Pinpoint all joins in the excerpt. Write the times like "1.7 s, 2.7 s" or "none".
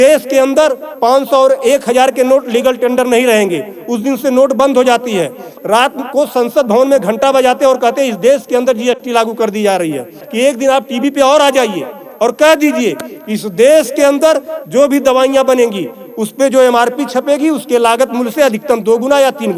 5.5 s, 10.2 s